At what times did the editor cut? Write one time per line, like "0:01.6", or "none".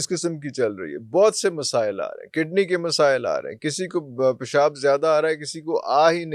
none